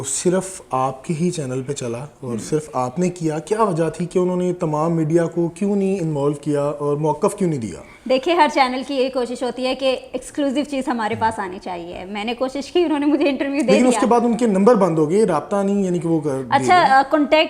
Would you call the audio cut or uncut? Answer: uncut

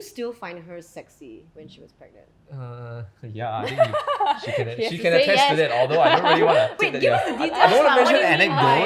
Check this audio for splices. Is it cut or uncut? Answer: cut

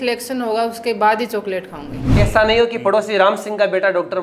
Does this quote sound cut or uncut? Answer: cut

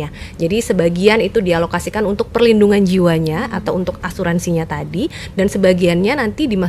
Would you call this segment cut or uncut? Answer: uncut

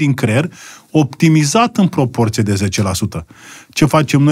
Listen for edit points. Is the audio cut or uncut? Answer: uncut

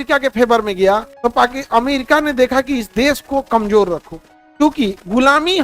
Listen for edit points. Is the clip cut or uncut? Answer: cut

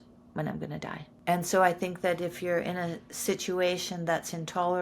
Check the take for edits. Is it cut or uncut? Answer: cut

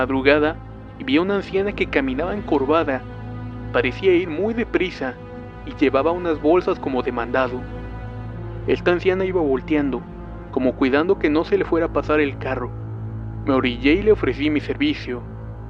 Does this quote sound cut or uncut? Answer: cut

